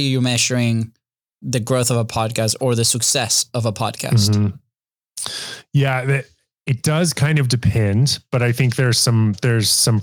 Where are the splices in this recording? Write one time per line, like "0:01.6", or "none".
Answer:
none